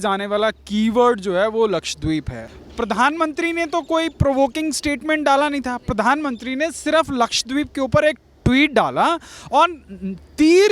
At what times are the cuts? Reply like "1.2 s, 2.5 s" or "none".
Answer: 2.4 s

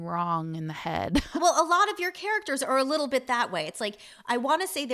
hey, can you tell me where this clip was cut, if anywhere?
1.3 s

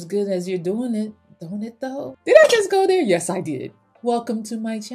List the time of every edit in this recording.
2.2 s

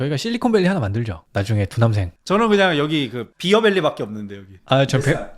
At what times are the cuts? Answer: 2.1 s

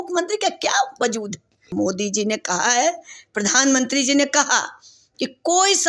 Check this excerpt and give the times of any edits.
1.7 s

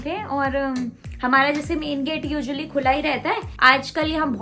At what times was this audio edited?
3.5 s

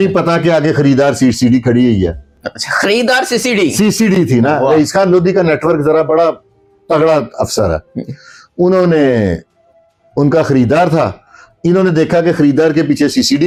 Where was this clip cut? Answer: none

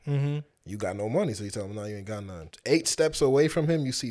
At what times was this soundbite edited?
2.4 s

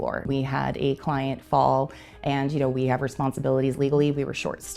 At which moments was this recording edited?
none

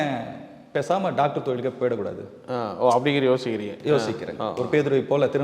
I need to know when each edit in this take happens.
none

